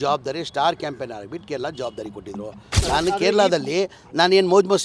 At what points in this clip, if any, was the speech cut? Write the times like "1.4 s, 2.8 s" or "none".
2.7 s